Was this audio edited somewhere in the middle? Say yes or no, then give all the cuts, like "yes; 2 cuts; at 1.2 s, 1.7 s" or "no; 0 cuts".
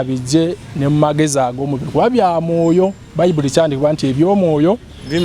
no; 0 cuts